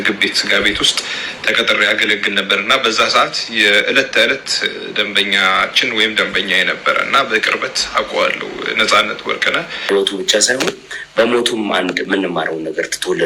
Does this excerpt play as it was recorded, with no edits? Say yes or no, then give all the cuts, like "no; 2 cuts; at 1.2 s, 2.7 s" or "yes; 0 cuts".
no; 1 cut; at 9.9 s